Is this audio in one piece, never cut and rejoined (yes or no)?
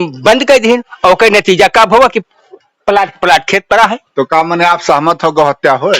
yes